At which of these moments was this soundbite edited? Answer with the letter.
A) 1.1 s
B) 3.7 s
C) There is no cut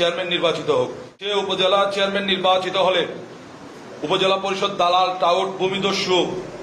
A